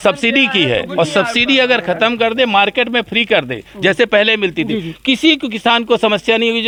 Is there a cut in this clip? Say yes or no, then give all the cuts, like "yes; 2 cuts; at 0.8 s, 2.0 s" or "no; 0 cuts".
no; 0 cuts